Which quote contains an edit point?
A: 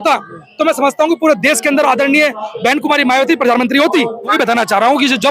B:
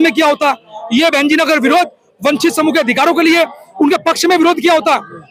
A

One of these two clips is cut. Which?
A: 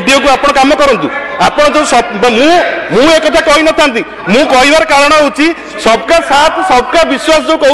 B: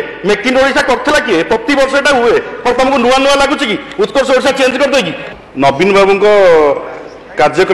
B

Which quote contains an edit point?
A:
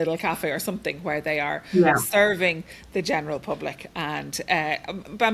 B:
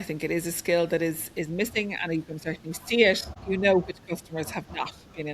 B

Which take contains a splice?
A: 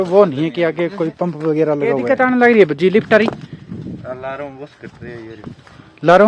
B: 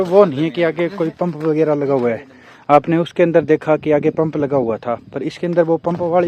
A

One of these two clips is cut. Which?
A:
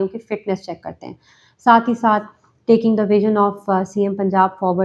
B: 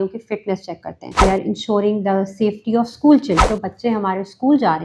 B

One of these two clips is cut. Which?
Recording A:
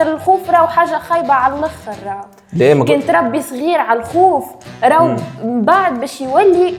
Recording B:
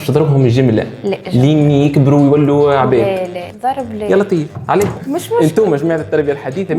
B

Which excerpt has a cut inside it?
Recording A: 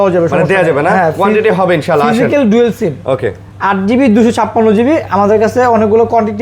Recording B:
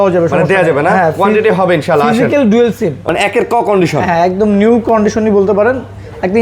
B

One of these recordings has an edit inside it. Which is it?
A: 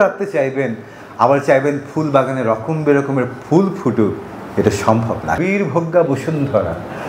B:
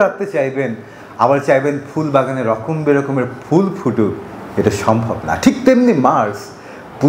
A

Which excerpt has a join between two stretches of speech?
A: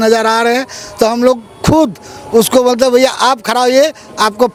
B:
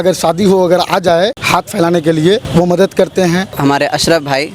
B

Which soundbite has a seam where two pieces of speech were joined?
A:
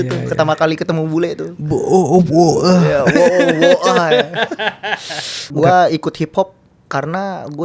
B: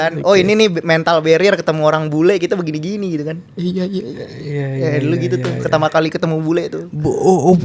A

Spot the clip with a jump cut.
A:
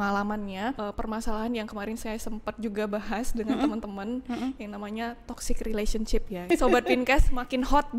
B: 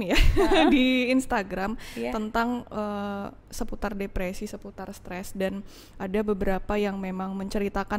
A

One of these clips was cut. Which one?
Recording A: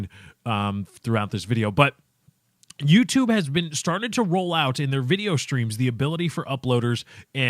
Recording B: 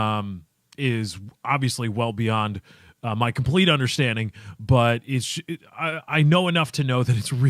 A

